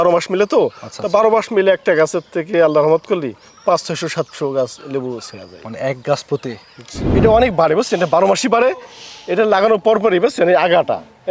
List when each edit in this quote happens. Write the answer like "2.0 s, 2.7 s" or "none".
6.9 s